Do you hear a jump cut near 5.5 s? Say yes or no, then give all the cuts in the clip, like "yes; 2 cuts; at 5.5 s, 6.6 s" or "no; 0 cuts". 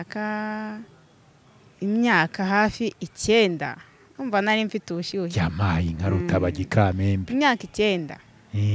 no; 0 cuts